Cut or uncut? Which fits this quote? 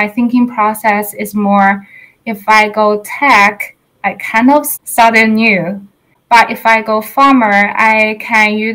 cut